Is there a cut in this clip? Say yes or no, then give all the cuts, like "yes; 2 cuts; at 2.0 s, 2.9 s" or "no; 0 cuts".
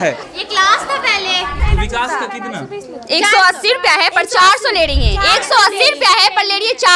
yes; 1 cut; at 1.6 s